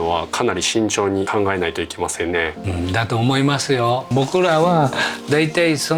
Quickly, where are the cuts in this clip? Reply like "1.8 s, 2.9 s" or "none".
1.3 s, 2.6 s, 4.1 s